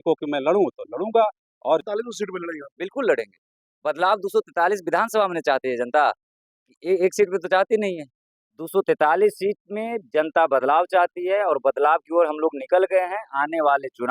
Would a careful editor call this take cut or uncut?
cut